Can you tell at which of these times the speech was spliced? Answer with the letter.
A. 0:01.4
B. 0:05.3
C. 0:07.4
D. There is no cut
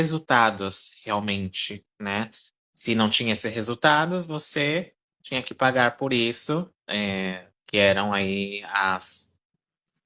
D